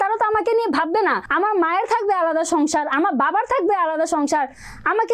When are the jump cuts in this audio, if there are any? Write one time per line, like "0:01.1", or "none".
0:01.2